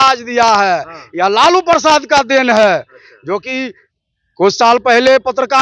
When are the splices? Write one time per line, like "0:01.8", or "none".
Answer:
none